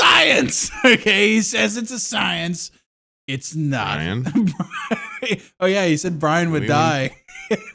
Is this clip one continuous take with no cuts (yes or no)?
yes